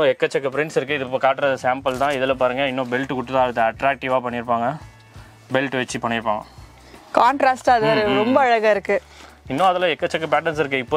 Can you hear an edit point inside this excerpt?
no; 0 cuts

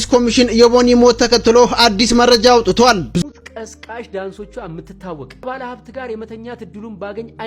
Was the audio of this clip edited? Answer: yes; 1 cut; at 3.2 s

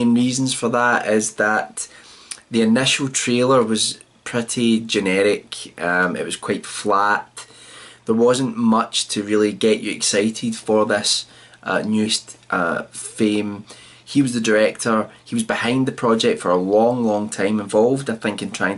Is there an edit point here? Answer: no; 0 cuts

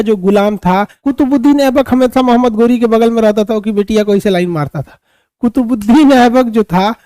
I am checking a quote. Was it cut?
yes; 1 cut; at 1.0 s

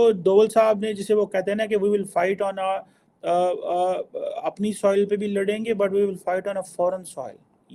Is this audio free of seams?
yes; 0 cuts

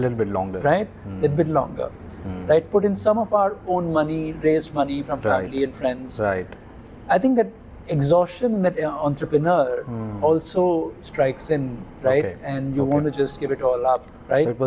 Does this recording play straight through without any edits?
yes; 0 cuts

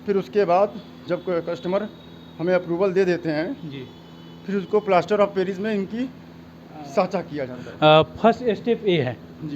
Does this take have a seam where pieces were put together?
no; 0 cuts

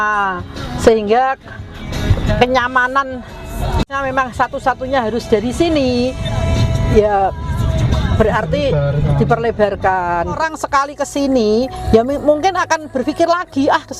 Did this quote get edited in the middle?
yes; 1 cut; at 10.4 s

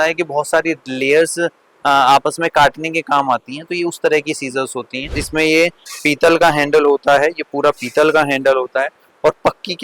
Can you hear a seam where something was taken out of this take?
yes; 1 cut; at 5.2 s

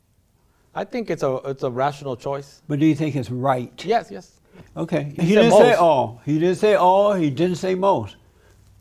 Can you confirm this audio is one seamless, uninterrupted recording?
no; 1 cut; at 4.8 s

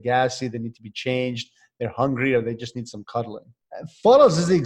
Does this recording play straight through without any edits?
no; 1 cut; at 3.6 s

